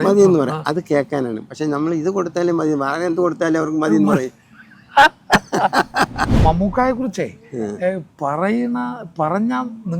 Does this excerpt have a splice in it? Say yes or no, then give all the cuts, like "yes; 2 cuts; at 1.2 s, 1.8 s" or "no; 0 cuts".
yes; 1 cut; at 6.3 s